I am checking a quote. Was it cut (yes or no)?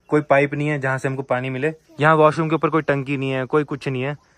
yes